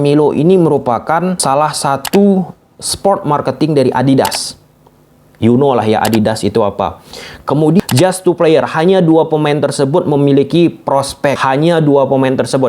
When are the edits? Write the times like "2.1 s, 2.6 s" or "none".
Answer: 1.4 s, 7.8 s, 11.4 s